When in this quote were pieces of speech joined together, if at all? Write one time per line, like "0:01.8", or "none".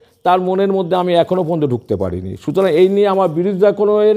none